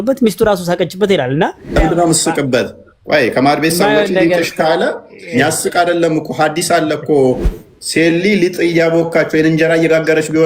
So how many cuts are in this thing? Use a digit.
1